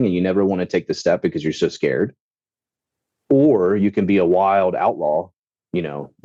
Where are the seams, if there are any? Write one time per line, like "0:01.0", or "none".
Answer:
none